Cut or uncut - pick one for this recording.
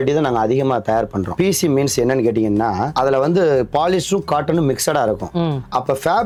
uncut